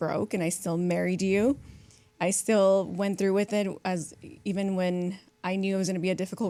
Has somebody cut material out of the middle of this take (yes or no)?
no